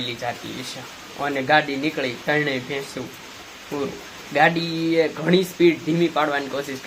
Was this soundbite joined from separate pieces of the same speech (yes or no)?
no